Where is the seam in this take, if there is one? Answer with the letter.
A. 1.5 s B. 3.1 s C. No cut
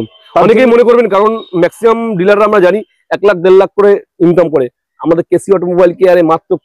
C